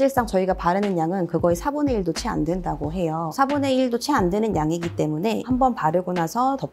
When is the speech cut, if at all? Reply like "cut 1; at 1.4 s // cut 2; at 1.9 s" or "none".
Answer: cut 1; at 3.3 s